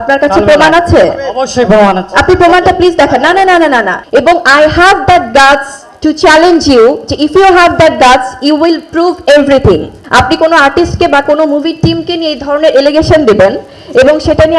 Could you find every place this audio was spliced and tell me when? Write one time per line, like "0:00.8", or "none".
0:04.0
0:10.0